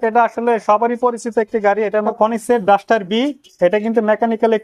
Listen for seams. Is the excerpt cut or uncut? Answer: cut